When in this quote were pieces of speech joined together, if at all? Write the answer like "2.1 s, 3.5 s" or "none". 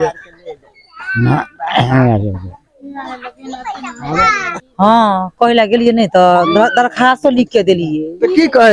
4.5 s